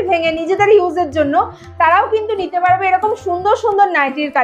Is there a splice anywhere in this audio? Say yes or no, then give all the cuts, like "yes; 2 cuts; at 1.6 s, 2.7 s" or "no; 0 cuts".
no; 0 cuts